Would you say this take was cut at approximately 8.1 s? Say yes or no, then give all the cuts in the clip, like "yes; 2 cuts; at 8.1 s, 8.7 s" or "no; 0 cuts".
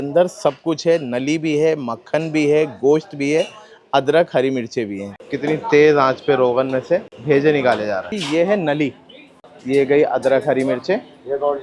yes; 3 cuts; at 5.0 s, 8.1 s, 9.5 s